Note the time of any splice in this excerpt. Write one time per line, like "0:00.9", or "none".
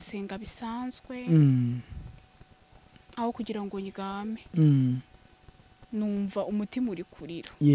none

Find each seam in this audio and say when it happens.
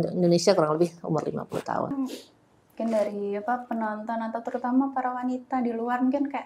0:01.9

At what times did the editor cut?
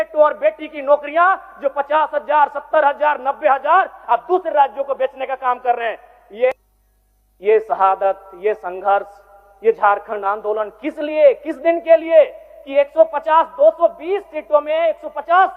0:06.5

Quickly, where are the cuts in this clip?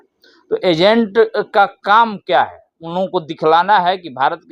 none

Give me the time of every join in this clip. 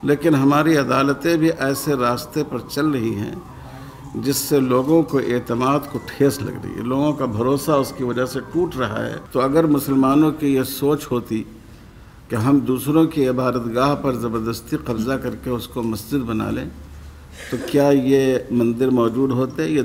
0:09.2

